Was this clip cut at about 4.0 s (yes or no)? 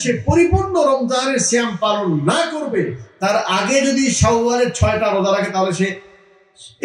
no